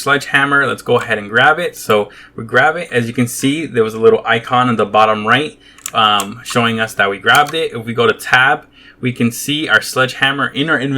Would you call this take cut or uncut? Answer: uncut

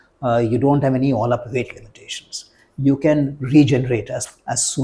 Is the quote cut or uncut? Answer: uncut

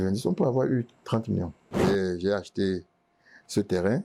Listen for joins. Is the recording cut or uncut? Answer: cut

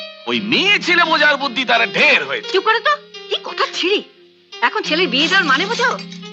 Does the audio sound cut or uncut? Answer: uncut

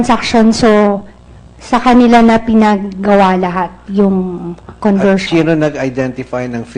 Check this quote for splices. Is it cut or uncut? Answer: uncut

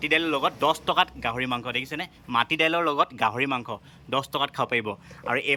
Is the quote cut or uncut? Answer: uncut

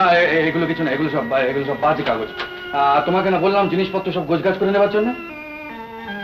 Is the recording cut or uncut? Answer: uncut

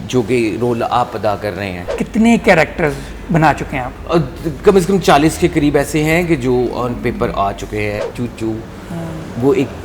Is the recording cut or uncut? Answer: cut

